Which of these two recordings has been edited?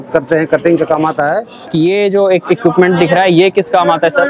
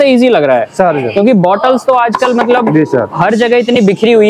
first; 1 cut; at 1.7 s

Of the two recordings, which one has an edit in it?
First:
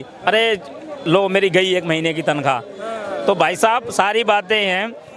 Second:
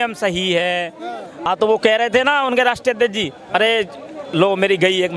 second; 1 cut; at 1.5 s

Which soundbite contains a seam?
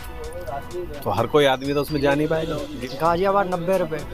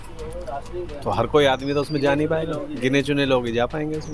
first; 1 cut; at 2.7 s

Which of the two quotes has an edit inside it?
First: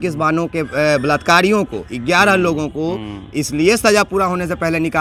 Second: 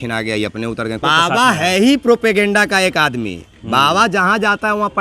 second; 1 cut; at 1.0 s

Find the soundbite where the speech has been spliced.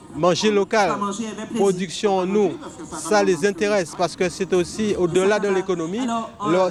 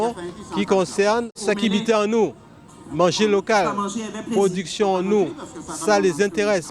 second; 1 cut; at 1.3 s

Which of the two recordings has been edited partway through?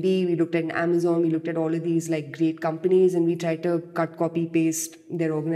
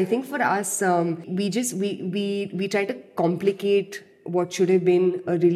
second; 1 cut; at 1.3 s

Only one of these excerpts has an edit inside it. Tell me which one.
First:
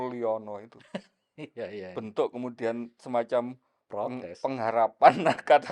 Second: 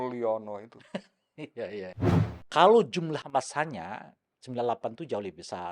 second; 1 cut; at 1.9 s

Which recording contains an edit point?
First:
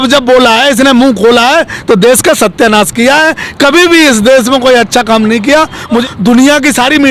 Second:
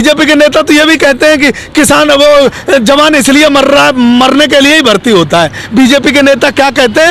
first; 1 cut; at 6.0 s

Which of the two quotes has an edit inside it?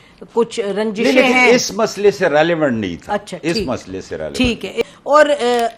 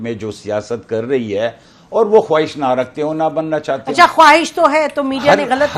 first; 1 cut; at 4.8 s

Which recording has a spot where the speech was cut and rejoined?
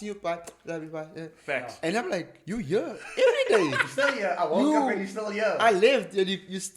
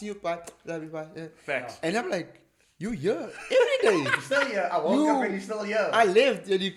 first; 1 cut; at 2.4 s

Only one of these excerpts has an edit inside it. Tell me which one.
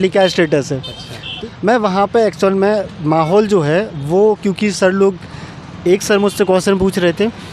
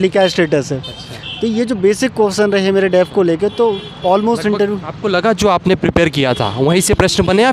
first; 1 cut; at 1.3 s

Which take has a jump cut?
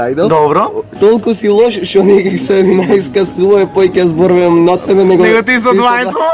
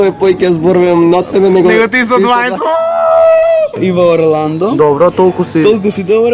second; 1 cut; at 3.7 s

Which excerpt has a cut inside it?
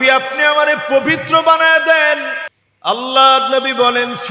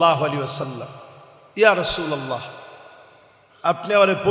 first; 1 cut; at 2.5 s

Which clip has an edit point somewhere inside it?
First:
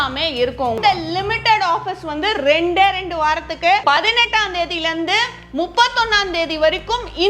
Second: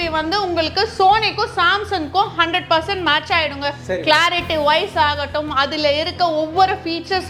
first; 2 cuts; at 0.8 s, 3.8 s

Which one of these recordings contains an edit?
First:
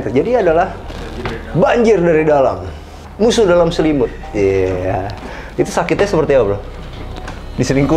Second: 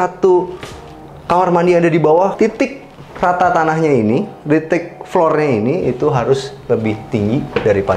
second; 1 cut; at 2.3 s

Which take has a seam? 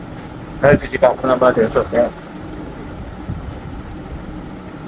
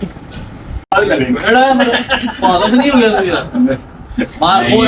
second; 1 cut; at 0.9 s

